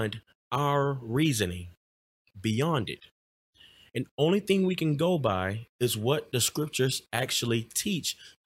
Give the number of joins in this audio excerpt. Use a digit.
0